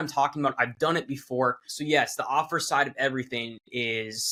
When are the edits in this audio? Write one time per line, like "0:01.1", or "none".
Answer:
none